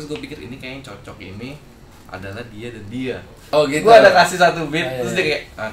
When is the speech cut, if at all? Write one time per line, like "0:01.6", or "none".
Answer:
0:03.3